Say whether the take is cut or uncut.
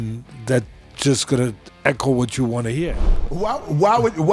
cut